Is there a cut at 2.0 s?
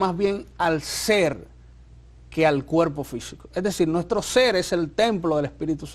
no; 0 cuts

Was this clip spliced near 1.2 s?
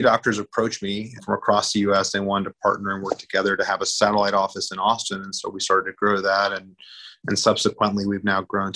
yes; 1 cut; at 1.2 s

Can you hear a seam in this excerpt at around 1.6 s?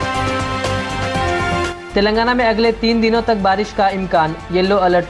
yes; 1 cut; at 1.6 s

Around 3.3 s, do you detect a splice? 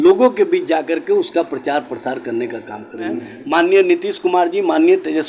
yes; 1 cut; at 3.3 s

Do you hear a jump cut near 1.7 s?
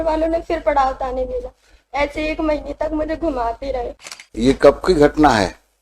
no; 1 cut; at 4.0 s

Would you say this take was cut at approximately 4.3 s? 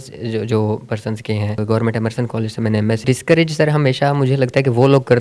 no; 2 cuts; at 1.6 s, 3.0 s

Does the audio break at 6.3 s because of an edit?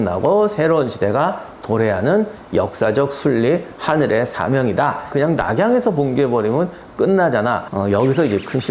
no; 2 cuts; at 5.1 s, 7.7 s

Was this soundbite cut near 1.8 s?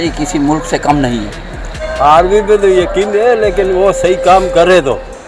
yes; 1 cut; at 1.8 s

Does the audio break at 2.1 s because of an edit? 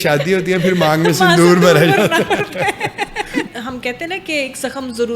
no; 1 cut; at 3.5 s

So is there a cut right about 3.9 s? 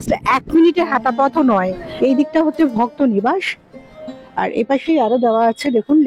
no; 1 cut; at 1.8 s

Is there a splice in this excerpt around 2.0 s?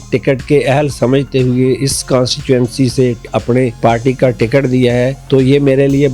no; 2 cuts; at 3.7 s, 5.2 s

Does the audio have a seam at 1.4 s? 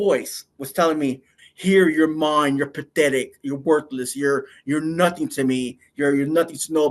yes; 1 cut; at 1.4 s

